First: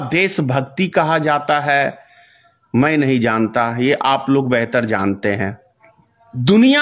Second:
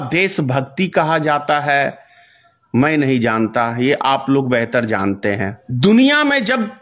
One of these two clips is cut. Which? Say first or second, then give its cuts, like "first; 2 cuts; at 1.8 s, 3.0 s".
second; 1 cut; at 5.6 s